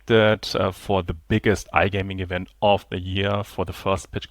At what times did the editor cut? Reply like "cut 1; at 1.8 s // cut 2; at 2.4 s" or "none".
cut 1; at 1.1 s